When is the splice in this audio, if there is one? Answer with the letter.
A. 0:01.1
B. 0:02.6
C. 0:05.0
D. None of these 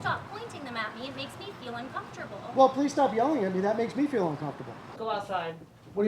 C